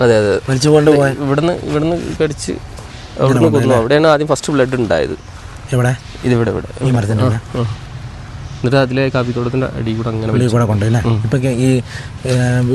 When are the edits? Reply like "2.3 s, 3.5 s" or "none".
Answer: none

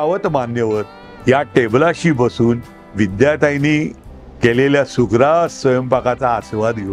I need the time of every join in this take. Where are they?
1.0 s

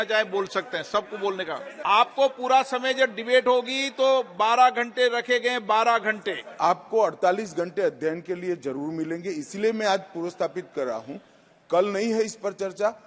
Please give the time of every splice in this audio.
1.7 s, 6.4 s

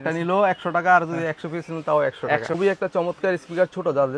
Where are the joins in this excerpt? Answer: 2.6 s

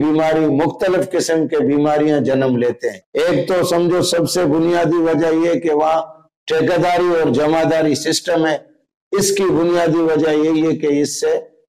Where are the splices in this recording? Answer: 2.9 s

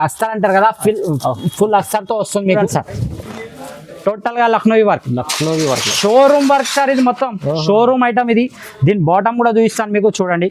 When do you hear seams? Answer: 2.6 s

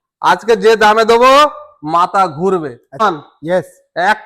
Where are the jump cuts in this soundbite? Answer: 3.0 s

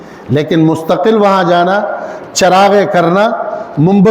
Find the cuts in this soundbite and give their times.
none

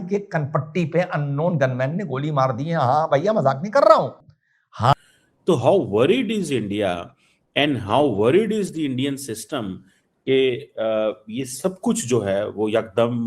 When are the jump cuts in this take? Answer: 4.9 s

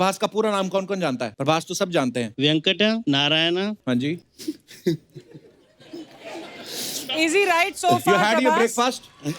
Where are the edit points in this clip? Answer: 1.3 s, 2.3 s, 3.0 s, 4.1 s

